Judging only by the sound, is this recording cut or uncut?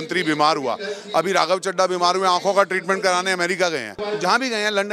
cut